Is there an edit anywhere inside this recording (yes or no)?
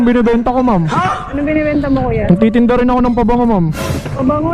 no